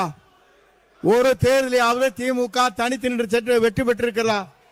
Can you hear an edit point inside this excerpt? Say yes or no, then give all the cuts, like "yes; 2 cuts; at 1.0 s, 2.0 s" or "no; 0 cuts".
no; 0 cuts